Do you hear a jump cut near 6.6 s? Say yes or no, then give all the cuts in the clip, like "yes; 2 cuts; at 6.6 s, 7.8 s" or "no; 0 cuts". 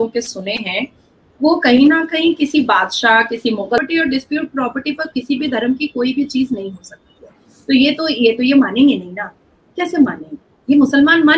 no; 1 cut; at 3.8 s